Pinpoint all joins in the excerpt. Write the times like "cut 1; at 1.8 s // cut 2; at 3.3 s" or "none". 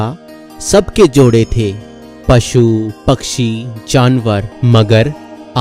cut 1; at 4.5 s